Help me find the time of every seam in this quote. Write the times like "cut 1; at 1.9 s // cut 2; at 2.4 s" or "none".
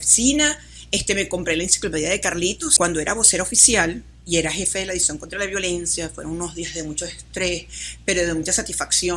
cut 1; at 2.7 s